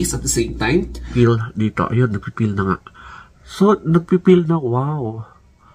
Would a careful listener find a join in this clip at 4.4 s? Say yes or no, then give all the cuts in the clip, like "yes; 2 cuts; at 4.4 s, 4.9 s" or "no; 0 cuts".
no; 1 cut; at 1.1 s